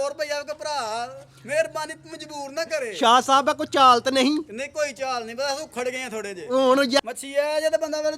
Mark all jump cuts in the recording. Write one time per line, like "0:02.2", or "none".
0:07.0